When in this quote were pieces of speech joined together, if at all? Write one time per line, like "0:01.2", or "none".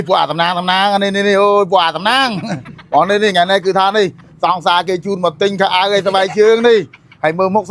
none